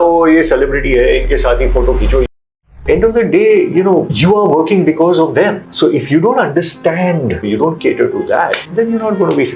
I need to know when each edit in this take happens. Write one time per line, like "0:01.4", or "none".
0:02.5
0:04.1
0:05.7
0:07.4
0:08.6